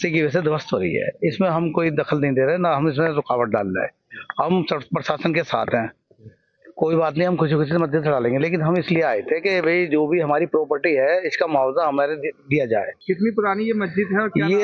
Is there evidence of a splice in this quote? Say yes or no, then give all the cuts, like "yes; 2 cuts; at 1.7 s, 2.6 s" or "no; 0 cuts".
yes; 1 cut; at 5.3 s